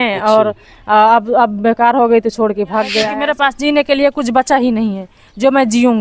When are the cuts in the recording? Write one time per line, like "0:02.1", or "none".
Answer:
0:03.0